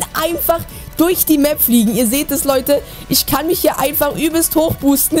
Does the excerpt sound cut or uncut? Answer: uncut